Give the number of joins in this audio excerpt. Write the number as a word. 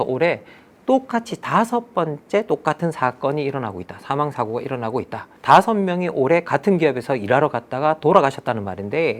zero